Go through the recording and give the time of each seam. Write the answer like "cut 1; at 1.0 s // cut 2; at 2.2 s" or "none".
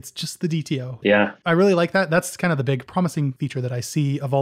cut 1; at 1.0 s // cut 2; at 3.4 s